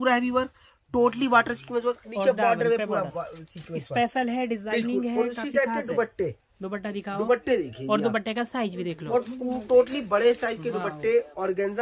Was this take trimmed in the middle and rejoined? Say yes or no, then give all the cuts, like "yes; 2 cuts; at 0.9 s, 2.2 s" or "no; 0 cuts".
no; 0 cuts